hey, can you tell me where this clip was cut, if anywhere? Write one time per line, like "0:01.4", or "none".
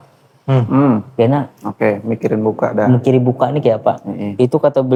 none